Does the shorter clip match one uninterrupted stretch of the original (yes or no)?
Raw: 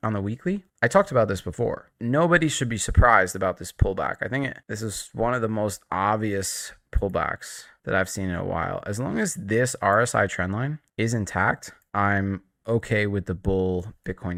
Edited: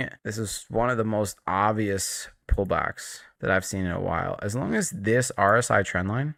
yes